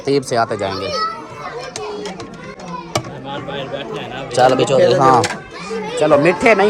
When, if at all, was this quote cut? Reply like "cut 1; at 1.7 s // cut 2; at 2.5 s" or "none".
none